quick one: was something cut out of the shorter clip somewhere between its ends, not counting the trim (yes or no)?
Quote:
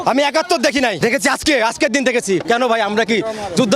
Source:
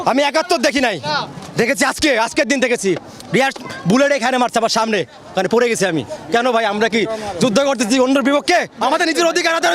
yes